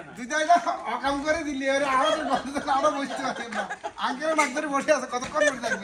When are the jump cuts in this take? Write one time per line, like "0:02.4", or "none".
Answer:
none